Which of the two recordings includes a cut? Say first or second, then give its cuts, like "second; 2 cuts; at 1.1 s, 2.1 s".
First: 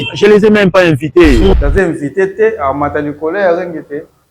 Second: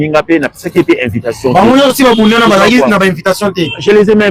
first; 1 cut; at 1.6 s